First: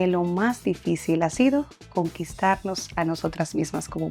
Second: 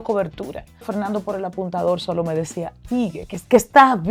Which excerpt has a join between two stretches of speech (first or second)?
second